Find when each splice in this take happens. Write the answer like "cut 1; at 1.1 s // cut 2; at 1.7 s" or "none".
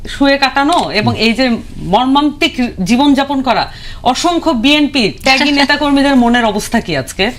none

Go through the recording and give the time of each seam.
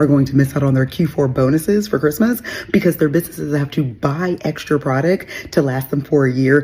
none

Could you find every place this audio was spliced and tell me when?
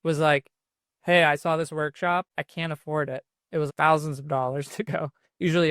cut 1; at 2.3 s // cut 2; at 3.7 s

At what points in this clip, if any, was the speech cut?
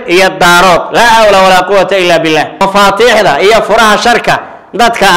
cut 1; at 2.5 s

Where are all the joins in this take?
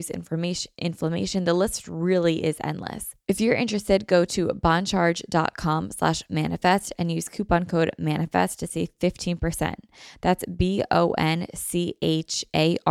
cut 1; at 3.1 s

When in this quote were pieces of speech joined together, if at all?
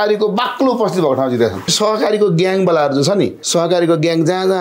cut 1; at 1.7 s // cut 2; at 3.4 s

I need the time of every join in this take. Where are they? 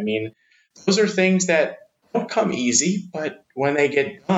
cut 1; at 1.9 s

